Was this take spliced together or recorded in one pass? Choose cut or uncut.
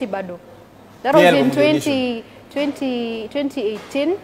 uncut